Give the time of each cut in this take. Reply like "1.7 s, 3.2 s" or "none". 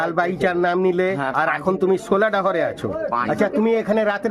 none